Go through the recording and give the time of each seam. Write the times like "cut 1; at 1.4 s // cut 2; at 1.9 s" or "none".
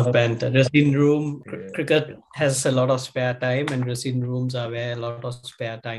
cut 1; at 1.4 s